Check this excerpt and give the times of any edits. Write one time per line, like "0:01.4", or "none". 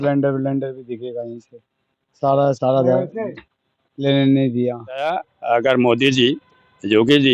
0:05.3